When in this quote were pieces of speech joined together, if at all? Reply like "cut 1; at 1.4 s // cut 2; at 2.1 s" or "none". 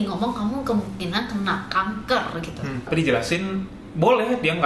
cut 1; at 2.8 s